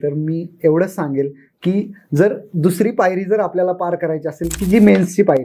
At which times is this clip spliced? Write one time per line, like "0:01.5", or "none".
none